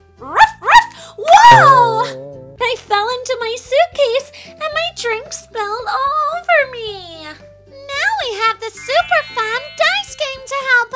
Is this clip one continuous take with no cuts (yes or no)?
no